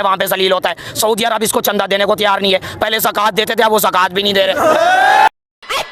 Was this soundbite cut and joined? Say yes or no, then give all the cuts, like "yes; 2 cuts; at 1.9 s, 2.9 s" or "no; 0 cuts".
no; 0 cuts